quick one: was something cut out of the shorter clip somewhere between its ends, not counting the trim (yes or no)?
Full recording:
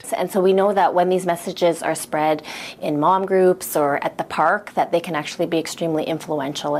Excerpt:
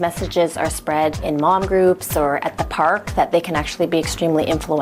yes